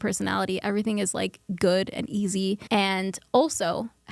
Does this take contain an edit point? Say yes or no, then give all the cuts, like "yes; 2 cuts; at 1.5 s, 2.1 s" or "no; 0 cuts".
yes; 1 cut; at 2.6 s